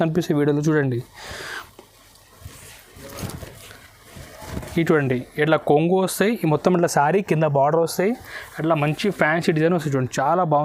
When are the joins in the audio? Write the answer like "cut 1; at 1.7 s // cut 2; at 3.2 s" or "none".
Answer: none